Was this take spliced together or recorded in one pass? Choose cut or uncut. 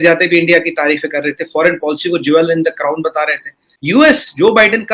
cut